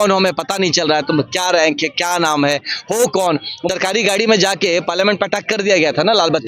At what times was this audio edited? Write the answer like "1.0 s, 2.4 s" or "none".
3.6 s